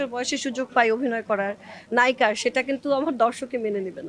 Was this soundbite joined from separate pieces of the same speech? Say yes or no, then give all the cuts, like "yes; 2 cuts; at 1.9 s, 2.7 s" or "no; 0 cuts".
no; 0 cuts